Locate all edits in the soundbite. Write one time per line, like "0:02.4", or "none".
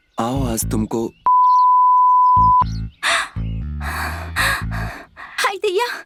none